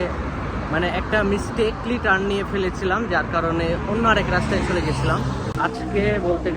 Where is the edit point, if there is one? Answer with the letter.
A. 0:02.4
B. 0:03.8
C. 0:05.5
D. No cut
C